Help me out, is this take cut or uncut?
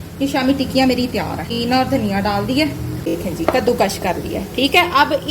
cut